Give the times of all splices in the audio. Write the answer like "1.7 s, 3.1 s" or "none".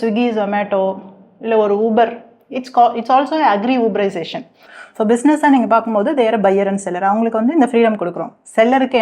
4.5 s